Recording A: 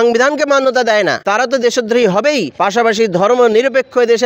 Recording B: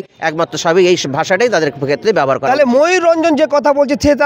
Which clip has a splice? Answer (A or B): A